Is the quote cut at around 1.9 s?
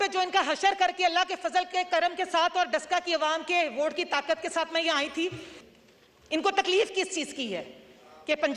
no; 1 cut; at 5.5 s

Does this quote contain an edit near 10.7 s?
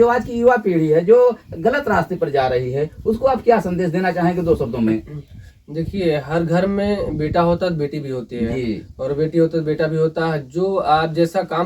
no; 0 cuts

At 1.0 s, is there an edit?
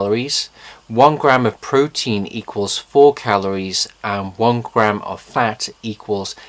yes; 1 cut; at 1.0 s

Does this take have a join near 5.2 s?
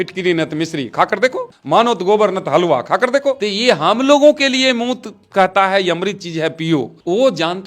no; 2 cuts; at 1.5 s, 3.5 s

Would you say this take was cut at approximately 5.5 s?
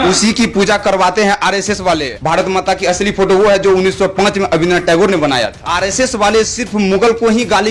yes; 2 cuts; at 2.1 s, 5.5 s

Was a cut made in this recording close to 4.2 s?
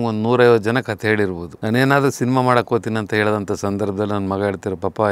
no; 1 cut; at 1.5 s

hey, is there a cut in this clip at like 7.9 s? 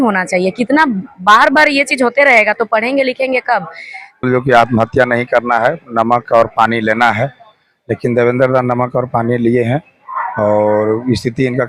no; 1 cut; at 4.2 s

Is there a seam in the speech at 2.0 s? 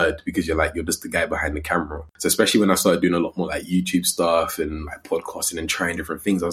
yes; 1 cut; at 2.0 s

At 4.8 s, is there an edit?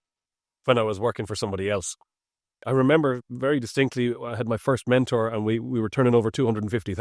no; 1 cut; at 2.6 s

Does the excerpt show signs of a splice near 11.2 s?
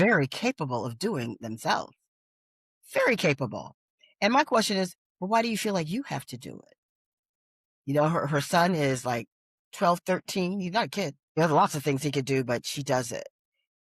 yes; 1 cut; at 11.2 s

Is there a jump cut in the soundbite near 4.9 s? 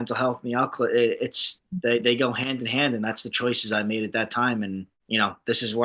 yes; 1 cut; at 4.9 s

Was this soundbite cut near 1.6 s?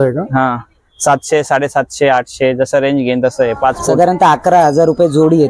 no; 1 cut; at 3.8 s

